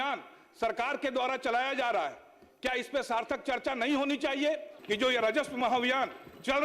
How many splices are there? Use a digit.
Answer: 1